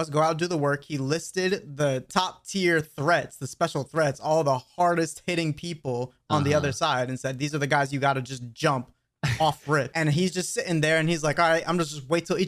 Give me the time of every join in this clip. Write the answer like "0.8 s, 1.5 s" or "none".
2.1 s, 9.9 s